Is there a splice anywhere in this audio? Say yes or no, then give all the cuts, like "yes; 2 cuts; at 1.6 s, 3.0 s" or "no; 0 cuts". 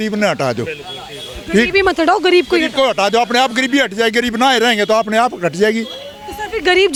no; 0 cuts